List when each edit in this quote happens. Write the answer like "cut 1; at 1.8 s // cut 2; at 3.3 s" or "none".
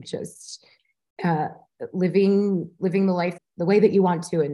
cut 1; at 3.4 s